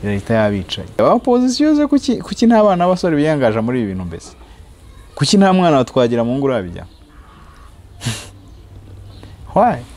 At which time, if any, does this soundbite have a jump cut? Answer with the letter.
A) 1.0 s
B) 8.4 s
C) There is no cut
A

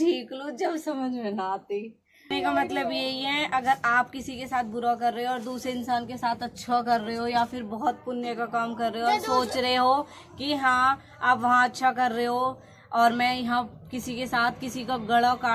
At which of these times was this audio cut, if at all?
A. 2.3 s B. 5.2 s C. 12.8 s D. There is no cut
A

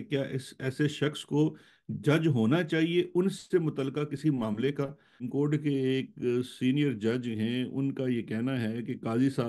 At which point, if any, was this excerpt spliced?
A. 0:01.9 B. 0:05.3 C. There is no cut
B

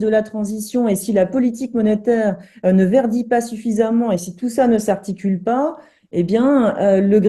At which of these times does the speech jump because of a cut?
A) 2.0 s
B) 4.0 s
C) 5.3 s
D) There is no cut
D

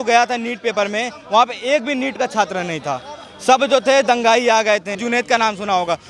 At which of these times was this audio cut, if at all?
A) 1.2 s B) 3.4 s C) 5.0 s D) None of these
C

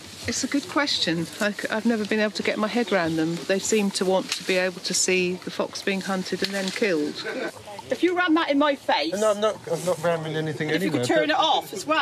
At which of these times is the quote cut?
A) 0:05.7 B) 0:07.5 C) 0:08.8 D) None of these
B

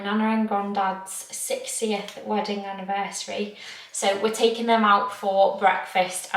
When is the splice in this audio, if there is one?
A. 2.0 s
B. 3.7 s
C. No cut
C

